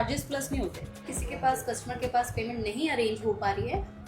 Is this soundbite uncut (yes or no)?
no